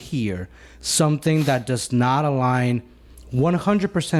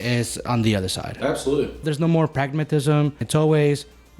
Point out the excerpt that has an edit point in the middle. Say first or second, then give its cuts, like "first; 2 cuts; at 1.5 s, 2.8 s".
second; 2 cuts; at 1.9 s, 3.2 s